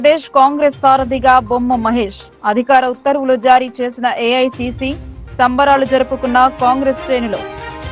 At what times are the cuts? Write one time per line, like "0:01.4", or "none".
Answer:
none